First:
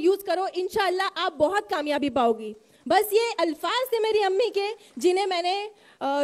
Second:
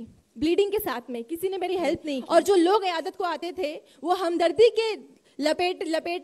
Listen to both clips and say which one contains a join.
second; 1 cut; at 2.2 s

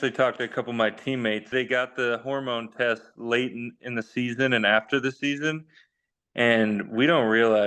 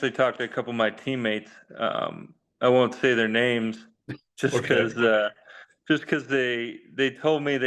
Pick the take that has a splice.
first; 1 cut; at 1.5 s

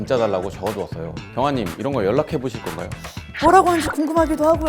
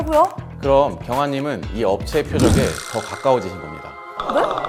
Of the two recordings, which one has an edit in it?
first; 1 cut; at 3.3 s

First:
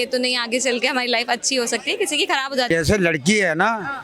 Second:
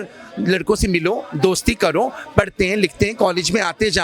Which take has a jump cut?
first; 1 cut; at 2.7 s

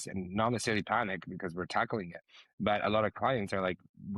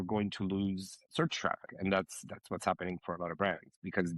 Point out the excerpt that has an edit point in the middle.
second; 1 cut; at 1.7 s

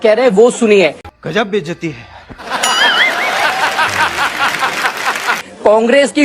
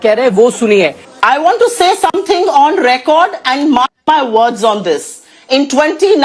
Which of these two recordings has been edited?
second; 1 cut; at 1.1 s

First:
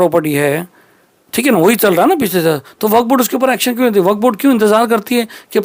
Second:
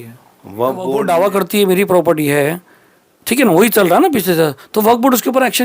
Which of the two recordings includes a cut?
second; 1 cut; at 0.9 s

